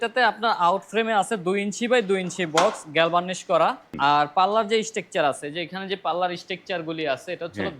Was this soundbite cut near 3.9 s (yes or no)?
yes